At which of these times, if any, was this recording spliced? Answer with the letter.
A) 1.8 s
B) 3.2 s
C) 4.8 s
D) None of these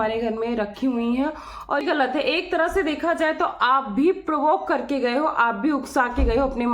A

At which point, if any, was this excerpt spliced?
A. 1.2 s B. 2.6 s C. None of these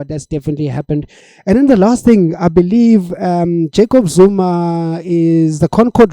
C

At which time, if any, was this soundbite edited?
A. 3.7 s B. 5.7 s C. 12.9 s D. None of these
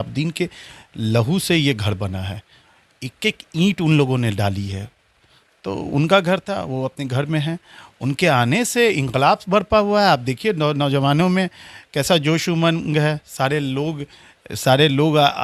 D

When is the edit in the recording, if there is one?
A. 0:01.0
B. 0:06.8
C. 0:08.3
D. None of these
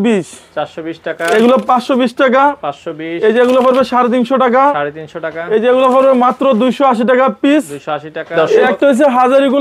C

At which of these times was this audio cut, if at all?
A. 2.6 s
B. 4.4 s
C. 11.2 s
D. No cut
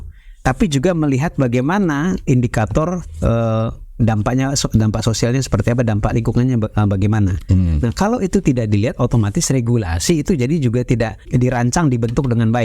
C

